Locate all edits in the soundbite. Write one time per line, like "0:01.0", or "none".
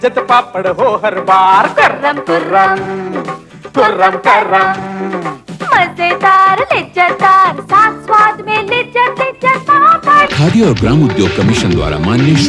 none